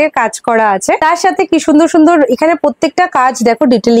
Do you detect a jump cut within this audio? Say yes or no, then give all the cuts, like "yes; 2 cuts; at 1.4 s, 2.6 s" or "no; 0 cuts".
no; 0 cuts